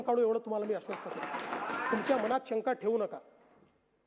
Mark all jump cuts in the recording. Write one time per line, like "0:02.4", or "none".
0:01.8